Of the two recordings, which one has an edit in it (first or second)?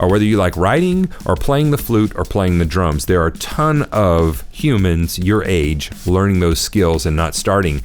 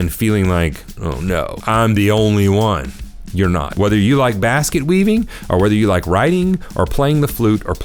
second